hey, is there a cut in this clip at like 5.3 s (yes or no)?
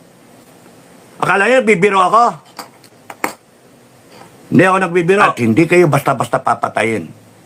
yes